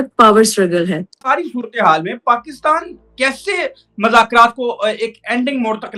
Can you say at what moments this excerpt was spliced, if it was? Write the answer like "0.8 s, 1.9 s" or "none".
1.2 s